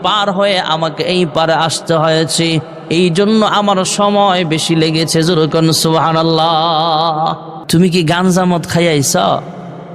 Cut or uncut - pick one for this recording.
cut